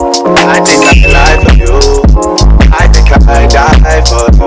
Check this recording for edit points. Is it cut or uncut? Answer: uncut